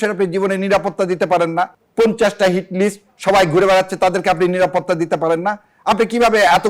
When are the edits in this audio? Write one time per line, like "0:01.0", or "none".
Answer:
none